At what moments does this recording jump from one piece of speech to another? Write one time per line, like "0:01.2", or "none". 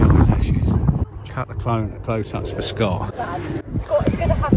0:01.1
0:03.1